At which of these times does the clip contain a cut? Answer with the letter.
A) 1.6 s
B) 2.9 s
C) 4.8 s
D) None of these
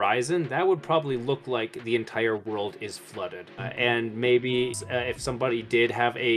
C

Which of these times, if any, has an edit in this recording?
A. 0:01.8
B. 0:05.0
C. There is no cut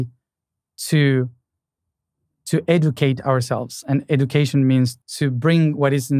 B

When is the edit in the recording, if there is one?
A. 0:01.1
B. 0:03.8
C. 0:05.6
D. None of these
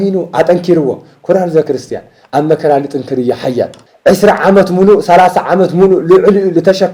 B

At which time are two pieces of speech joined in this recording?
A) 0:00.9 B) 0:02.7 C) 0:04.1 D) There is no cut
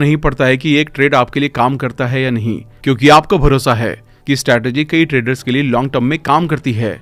D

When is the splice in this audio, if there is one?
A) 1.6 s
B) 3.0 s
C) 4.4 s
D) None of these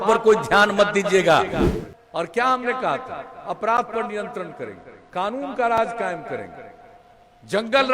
A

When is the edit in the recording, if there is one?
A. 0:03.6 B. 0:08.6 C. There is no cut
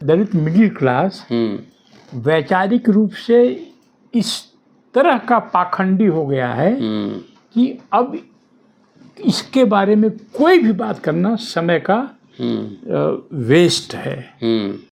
C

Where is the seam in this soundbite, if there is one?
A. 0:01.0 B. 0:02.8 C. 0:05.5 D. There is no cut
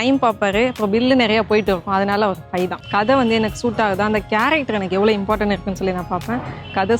B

